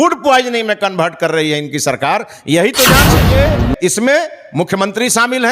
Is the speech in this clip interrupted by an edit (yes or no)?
yes